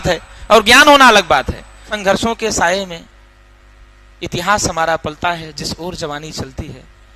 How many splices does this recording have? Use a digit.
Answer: 1